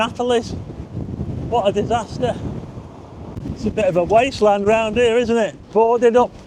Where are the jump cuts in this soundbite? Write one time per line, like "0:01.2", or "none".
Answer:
0:03.3
0:05.6